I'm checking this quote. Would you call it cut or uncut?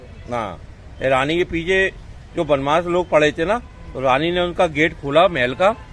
uncut